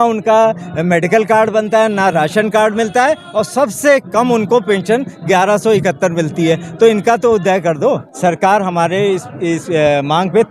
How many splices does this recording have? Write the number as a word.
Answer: one